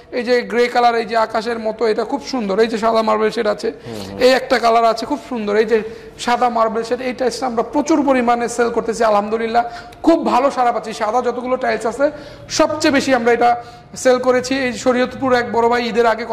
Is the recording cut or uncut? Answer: uncut